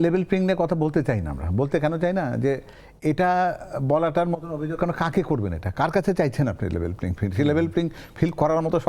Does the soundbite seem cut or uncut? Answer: uncut